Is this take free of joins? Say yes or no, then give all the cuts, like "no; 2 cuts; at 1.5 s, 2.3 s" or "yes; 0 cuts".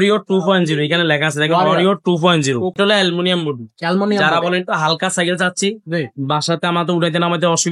no; 1 cut; at 2.7 s